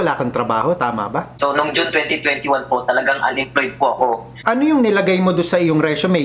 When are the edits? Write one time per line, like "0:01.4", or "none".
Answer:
0:01.4
0:04.3